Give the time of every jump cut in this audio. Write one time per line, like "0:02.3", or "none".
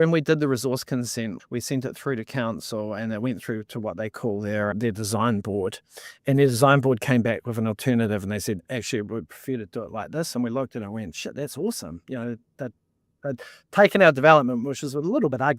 0:01.4
0:04.7